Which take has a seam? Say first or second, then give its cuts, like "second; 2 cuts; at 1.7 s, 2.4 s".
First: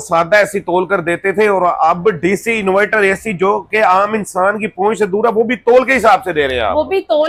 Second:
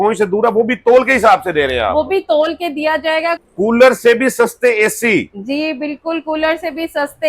second; 1 cut; at 3.4 s